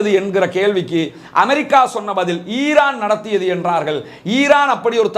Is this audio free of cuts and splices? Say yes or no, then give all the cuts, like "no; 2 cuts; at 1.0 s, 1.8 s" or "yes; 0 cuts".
yes; 0 cuts